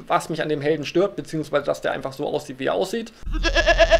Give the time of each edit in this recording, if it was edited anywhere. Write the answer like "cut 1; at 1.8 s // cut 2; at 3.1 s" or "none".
cut 1; at 1.6 s